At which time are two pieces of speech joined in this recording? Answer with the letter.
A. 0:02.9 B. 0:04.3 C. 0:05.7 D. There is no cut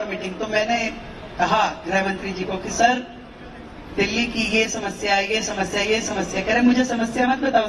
D